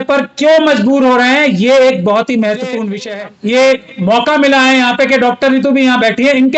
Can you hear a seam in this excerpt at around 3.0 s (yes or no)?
yes